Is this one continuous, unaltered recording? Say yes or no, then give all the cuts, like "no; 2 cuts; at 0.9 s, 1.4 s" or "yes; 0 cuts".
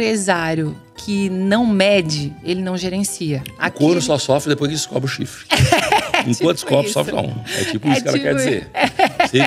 yes; 0 cuts